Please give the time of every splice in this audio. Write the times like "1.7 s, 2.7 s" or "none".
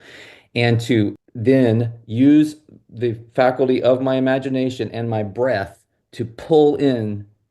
1.3 s